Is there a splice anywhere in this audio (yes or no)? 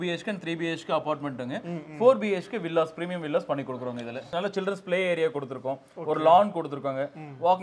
yes